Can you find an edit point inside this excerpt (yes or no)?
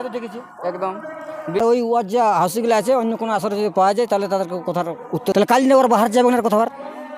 yes